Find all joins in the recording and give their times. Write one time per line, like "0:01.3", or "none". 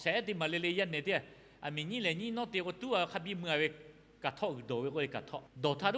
none